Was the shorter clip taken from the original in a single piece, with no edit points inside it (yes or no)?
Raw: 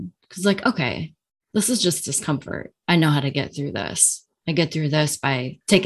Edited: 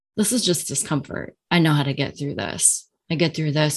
yes